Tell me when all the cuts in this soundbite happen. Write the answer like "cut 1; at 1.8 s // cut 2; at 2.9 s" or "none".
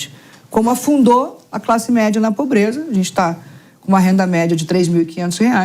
none